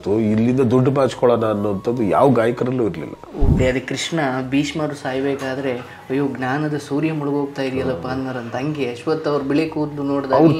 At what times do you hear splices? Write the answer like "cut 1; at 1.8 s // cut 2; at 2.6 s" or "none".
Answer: cut 1; at 3.5 s

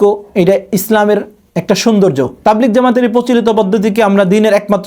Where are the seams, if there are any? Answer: cut 1; at 2.3 s

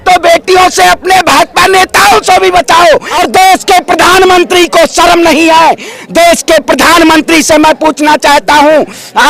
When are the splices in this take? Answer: cut 1; at 3.1 s

